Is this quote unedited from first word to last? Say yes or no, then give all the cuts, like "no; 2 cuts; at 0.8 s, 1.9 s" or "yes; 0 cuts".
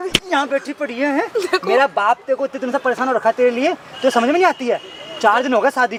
yes; 0 cuts